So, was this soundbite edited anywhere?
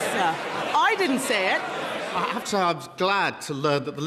yes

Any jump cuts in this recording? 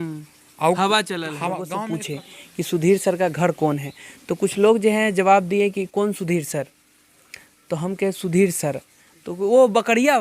yes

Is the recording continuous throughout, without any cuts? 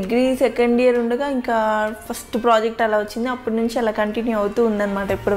yes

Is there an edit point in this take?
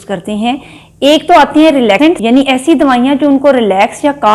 yes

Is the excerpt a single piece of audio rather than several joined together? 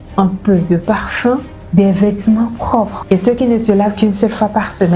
yes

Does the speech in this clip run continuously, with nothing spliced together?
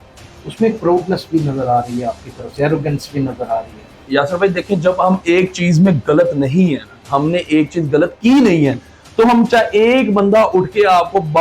no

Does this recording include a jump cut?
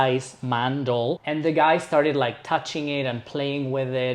yes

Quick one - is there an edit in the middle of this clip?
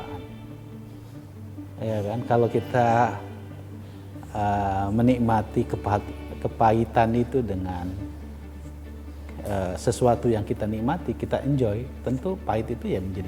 no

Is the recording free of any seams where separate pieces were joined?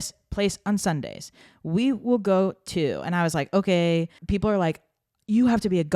no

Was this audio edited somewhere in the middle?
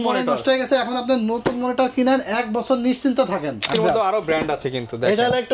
yes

